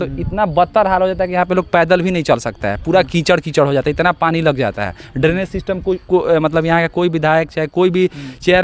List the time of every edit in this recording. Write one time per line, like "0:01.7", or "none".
none